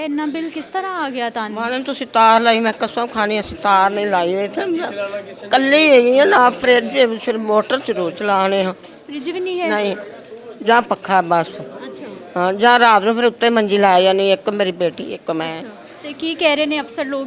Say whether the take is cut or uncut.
uncut